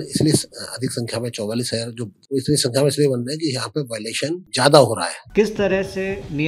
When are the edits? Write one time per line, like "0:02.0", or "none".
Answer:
0:02.2
0:04.5
0:05.2